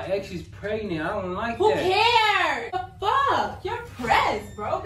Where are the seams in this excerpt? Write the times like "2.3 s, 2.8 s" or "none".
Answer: 2.7 s